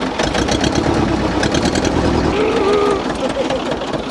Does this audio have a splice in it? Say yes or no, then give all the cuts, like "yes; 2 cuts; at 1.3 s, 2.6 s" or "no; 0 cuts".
yes; 1 cut; at 2.3 s